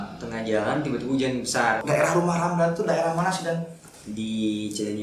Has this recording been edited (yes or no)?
yes